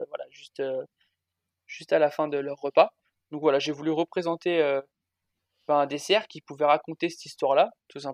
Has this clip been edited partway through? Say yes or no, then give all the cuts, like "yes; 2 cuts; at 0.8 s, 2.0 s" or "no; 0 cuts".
no; 0 cuts